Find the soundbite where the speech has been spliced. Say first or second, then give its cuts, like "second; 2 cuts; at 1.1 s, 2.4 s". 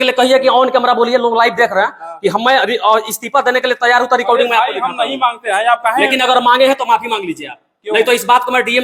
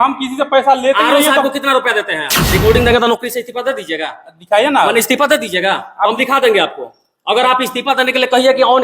second; 1 cut; at 2.5 s